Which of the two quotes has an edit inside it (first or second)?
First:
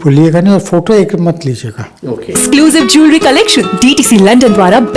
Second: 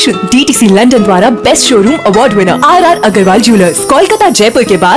first